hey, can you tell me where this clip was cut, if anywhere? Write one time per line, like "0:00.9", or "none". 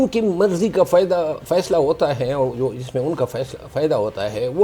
none